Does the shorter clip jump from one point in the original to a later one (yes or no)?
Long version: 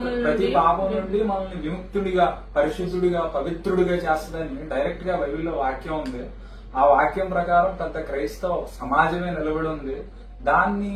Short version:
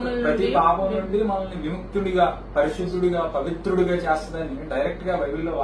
no